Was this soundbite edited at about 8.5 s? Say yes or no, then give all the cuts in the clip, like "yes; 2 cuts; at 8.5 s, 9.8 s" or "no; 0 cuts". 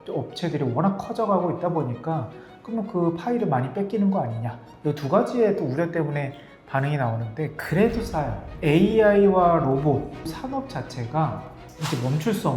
yes; 1 cut; at 8.5 s